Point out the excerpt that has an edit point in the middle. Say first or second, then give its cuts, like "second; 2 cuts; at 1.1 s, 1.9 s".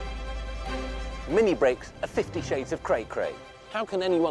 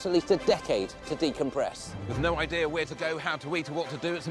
first; 1 cut; at 1.2 s